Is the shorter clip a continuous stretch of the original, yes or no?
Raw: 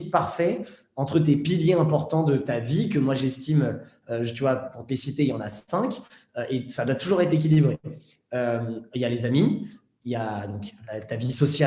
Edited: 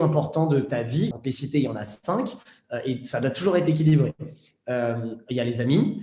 no